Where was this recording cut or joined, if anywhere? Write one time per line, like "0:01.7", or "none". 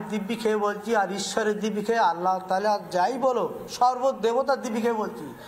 none